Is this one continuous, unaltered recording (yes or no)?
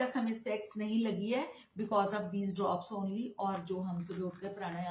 yes